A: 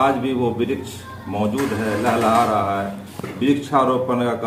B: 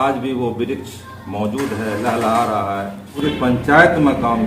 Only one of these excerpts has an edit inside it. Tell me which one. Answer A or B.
B